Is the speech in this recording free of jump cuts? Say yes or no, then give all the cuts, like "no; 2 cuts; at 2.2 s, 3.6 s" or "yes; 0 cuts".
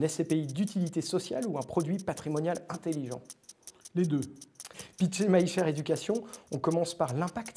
no; 1 cut; at 4.8 s